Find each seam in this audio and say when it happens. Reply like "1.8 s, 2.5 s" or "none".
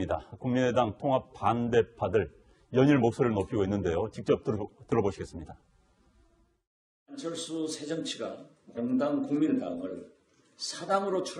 none

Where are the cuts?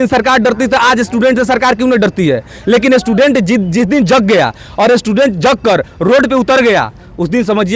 none

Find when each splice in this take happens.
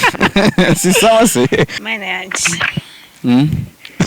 1.8 s

